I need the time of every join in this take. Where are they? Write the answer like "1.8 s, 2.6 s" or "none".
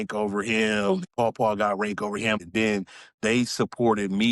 1.1 s, 2.4 s